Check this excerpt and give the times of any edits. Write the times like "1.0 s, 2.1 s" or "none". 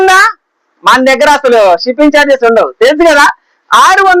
none